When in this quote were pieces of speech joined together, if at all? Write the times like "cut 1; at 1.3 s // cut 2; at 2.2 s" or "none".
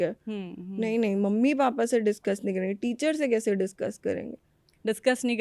none